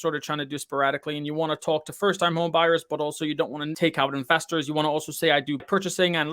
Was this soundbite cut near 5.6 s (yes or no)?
yes